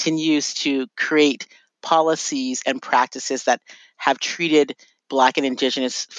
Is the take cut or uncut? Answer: cut